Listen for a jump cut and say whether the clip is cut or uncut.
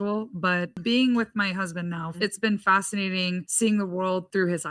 cut